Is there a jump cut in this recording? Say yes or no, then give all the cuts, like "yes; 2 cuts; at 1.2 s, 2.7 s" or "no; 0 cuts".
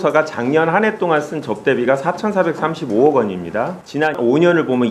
no; 0 cuts